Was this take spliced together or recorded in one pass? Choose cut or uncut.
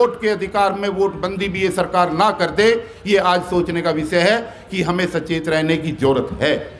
uncut